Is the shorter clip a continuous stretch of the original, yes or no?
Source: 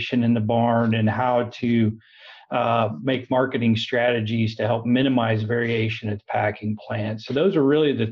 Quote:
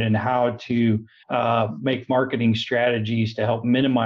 no